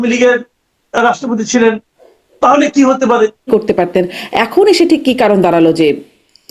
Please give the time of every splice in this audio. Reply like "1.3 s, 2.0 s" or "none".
3.5 s